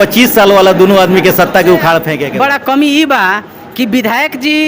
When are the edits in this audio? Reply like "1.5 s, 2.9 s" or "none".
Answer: 2.2 s